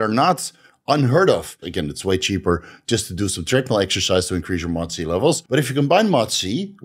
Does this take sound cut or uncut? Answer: cut